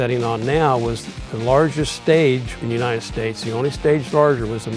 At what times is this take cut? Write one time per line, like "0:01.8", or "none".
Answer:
0:02.5